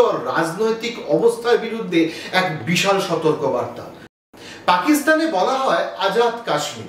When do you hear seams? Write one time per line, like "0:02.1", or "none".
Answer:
0:04.1